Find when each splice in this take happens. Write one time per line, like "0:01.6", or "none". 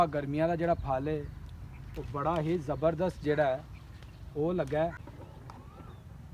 0:05.0